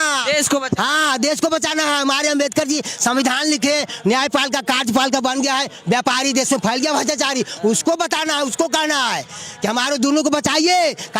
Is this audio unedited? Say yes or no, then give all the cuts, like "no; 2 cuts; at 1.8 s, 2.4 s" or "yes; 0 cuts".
yes; 0 cuts